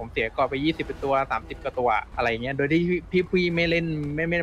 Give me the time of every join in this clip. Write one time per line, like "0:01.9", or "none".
0:02.1